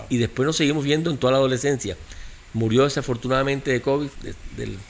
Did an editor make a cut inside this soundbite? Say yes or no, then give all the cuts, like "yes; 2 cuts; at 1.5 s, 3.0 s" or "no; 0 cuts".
no; 0 cuts